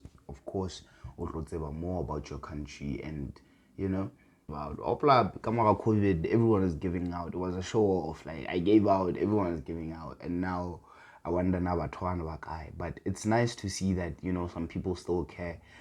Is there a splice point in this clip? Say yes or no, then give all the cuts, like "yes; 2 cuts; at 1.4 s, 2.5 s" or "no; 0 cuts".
yes; 1 cut; at 4.5 s